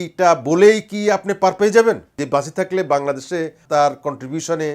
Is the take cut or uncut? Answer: cut